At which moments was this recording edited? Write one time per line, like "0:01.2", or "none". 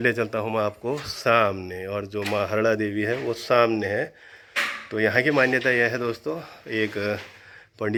none